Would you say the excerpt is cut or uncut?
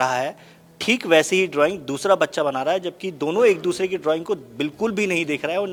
uncut